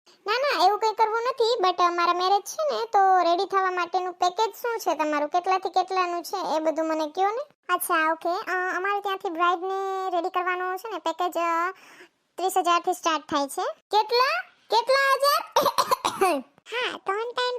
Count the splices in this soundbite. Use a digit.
1